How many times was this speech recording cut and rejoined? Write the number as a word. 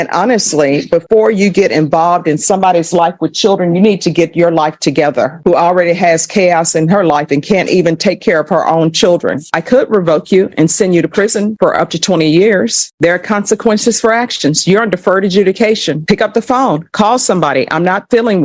three